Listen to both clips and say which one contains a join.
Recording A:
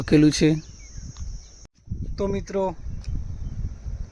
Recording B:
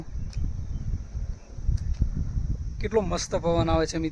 A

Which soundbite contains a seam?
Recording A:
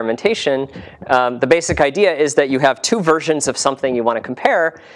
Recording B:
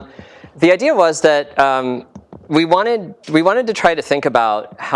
B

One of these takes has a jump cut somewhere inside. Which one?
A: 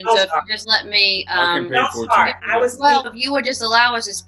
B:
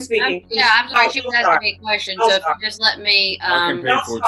A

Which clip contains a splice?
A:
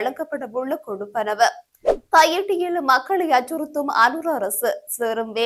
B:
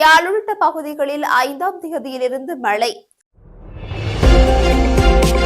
B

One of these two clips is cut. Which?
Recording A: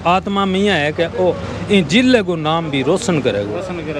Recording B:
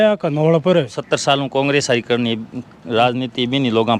B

